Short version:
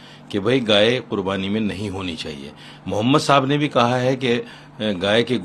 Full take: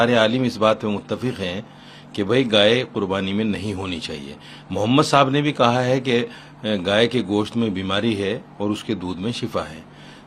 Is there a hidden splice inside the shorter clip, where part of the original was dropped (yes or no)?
no